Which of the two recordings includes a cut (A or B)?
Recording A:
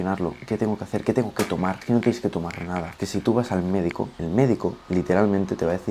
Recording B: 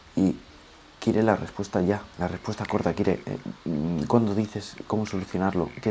A